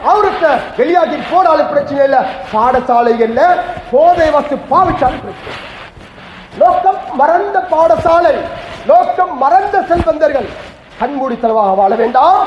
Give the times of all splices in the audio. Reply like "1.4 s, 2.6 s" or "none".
none